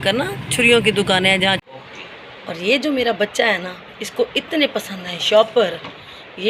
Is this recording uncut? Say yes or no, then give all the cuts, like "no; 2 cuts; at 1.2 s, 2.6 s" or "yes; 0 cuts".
no; 1 cut; at 1.6 s